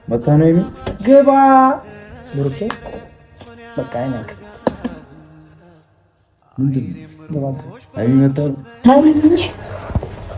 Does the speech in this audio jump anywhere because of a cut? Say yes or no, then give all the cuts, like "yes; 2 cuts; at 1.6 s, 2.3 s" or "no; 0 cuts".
yes; 1 cut; at 8.7 s